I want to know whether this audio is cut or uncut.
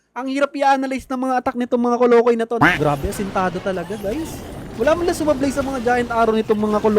cut